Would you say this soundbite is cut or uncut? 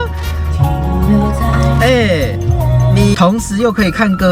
cut